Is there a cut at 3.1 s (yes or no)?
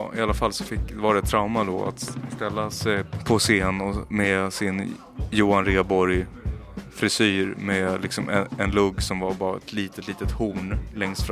yes